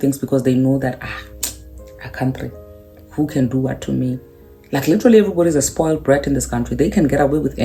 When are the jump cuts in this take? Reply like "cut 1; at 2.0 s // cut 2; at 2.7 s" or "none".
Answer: none